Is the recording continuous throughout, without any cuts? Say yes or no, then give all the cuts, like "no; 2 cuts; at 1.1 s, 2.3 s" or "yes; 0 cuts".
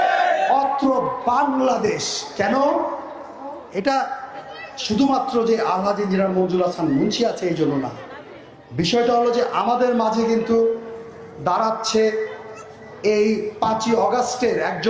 yes; 0 cuts